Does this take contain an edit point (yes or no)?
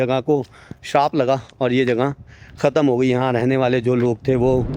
no